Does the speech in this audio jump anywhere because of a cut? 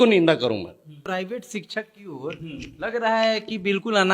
yes; 1 cut; at 1.1 s

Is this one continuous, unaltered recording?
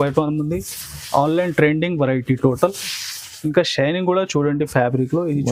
yes; 0 cuts

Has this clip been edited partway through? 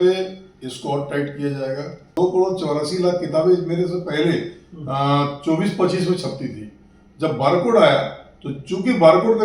yes; 1 cut; at 2.1 s

